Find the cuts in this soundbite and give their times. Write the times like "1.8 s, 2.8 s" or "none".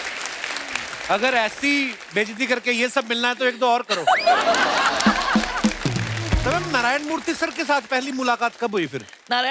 6.4 s